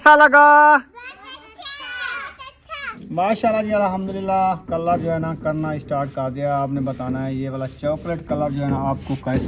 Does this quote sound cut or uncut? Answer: cut